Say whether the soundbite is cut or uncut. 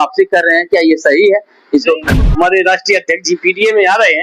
cut